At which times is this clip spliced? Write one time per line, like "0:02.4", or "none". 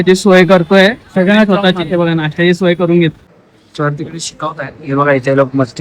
0:03.2